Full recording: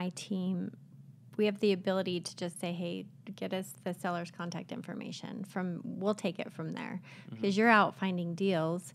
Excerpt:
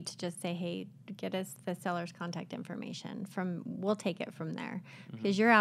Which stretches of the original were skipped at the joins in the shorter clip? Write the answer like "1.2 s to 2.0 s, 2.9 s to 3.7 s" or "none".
none